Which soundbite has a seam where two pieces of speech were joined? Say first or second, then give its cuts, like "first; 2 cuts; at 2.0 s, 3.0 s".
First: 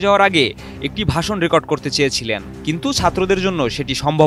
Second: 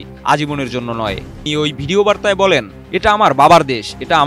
second; 1 cut; at 1.4 s